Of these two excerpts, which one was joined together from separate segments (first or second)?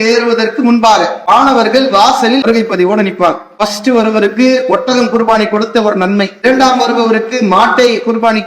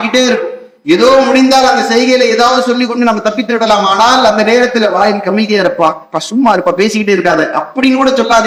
first